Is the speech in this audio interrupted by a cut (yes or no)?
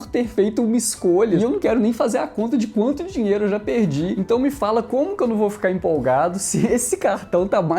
yes